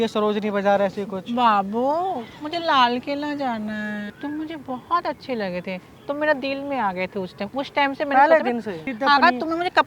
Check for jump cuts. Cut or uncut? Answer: cut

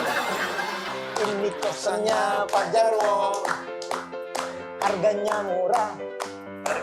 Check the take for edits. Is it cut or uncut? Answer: cut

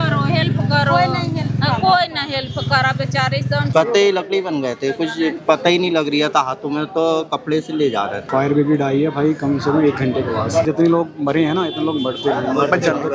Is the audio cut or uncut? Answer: cut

